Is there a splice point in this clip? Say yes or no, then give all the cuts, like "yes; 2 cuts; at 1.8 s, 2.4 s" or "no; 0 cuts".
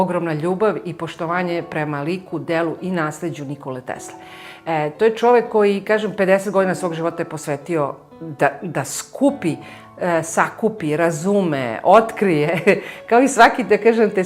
no; 0 cuts